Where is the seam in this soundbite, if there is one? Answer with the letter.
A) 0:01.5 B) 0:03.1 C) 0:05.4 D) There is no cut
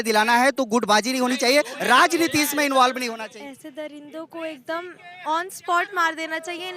B